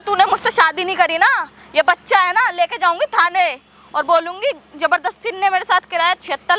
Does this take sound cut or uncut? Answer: uncut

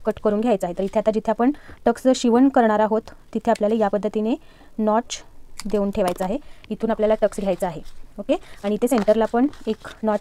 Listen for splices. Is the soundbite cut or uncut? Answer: uncut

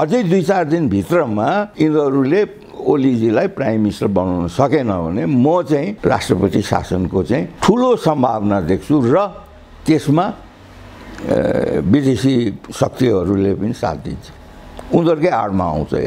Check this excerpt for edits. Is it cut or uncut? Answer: uncut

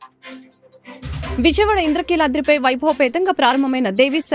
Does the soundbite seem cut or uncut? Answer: cut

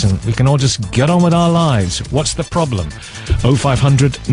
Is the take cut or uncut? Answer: uncut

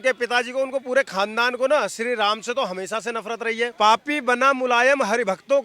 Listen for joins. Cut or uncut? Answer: cut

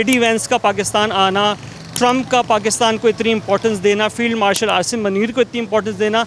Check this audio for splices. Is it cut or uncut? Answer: uncut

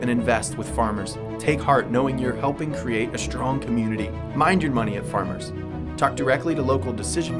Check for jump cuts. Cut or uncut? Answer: uncut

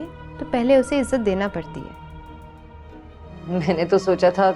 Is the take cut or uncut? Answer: cut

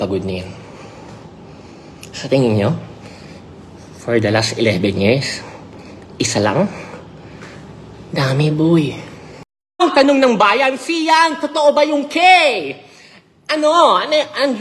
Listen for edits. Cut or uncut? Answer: cut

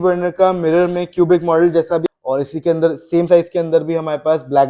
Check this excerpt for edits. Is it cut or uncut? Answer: cut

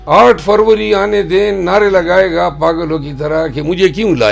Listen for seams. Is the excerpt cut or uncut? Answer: uncut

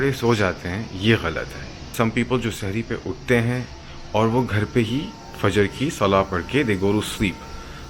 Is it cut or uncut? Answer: cut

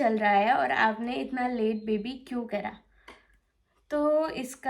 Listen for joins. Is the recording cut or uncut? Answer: uncut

